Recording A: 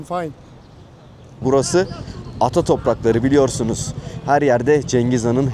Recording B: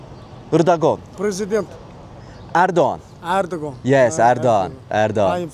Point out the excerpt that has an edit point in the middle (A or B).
A